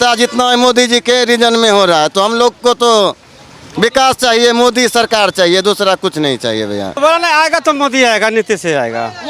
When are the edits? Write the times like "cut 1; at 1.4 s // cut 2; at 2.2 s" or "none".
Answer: cut 1; at 7.0 s